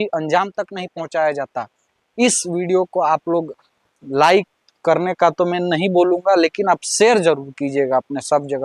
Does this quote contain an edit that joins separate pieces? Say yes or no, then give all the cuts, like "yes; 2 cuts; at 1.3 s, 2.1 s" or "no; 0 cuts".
no; 0 cuts